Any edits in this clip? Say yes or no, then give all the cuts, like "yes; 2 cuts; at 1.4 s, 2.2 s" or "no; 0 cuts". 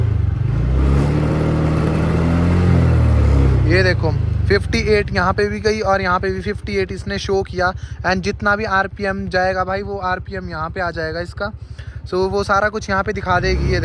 no; 0 cuts